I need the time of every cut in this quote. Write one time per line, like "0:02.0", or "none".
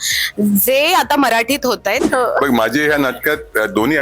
0:02.0